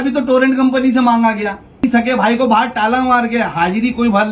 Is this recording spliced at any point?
yes; 1 cut; at 1.8 s

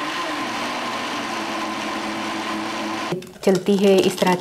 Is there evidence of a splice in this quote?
yes; 1 cut; at 3.2 s

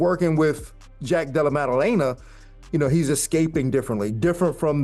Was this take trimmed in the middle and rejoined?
no; 0 cuts

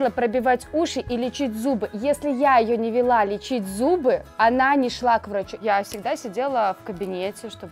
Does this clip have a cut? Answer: yes; 1 cut; at 5.6 s

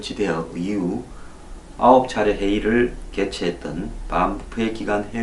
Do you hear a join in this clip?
no; 0 cuts

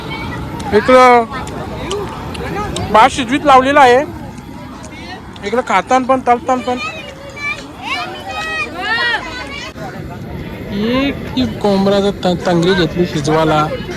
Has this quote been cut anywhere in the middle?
yes; 1 cut; at 9.8 s

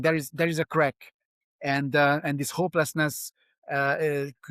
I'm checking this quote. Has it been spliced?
no; 0 cuts

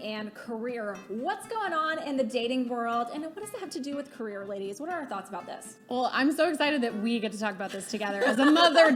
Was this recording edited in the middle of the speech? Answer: no; 0 cuts

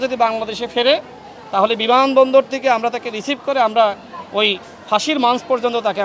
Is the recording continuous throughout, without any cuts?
yes; 0 cuts

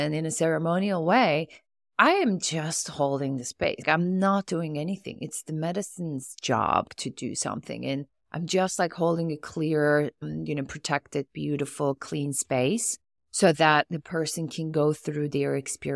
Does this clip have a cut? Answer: yes; 3 cuts; at 3.8 s, 6.9 s, 10.2 s

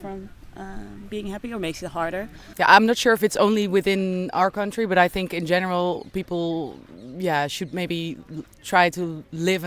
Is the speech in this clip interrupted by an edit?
yes; 1 cut; at 2.4 s

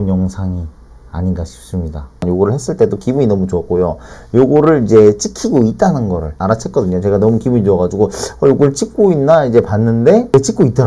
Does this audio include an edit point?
yes; 1 cut; at 2.2 s

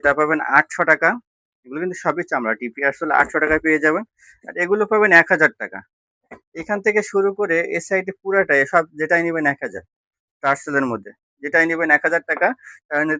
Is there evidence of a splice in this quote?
no; 0 cuts

